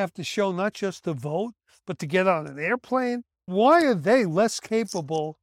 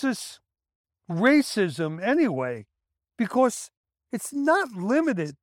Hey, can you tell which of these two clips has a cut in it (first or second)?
first